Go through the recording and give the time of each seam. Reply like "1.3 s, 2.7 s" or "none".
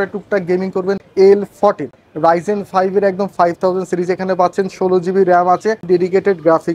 1.0 s, 5.8 s